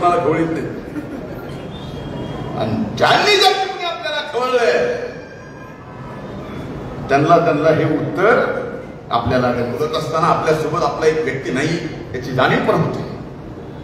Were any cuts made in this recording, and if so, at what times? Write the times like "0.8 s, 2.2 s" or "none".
9.8 s